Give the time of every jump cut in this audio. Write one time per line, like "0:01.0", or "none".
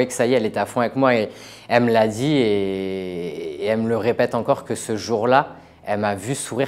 none